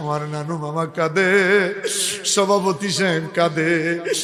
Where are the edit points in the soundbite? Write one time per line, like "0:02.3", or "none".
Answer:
none